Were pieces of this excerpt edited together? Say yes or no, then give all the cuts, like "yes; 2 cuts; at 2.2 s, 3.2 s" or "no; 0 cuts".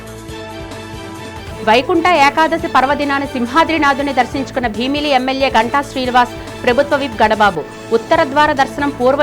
yes; 1 cut; at 1.0 s